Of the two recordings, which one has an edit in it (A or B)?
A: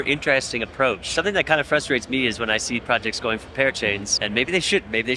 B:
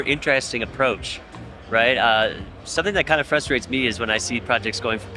A